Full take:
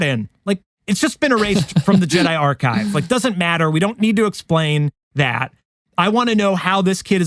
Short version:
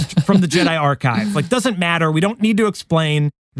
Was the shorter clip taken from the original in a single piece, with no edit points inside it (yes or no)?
yes